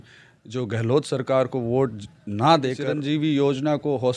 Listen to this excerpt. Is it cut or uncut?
cut